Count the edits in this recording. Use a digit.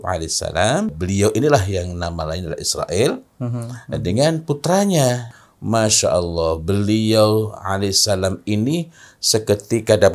2